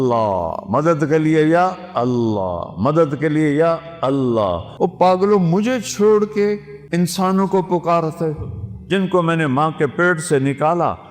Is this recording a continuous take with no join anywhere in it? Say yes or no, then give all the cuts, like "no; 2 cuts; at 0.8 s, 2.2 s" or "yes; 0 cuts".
no; 2 cuts; at 4.6 s, 6.7 s